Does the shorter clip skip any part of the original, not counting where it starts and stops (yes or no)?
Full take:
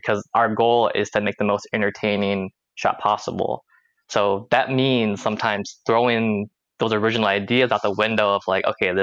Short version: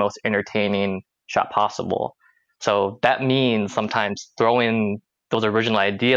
no